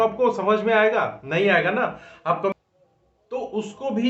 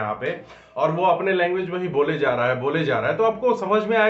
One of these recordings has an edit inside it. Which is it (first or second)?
first